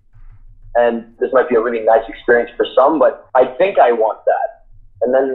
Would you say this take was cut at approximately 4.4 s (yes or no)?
no